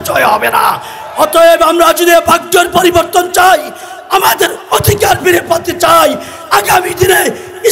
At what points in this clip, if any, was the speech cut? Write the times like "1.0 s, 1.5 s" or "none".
none